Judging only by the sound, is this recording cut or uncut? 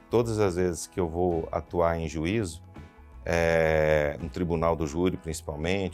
uncut